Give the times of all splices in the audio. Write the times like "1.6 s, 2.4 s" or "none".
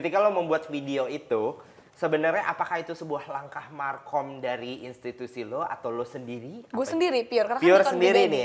none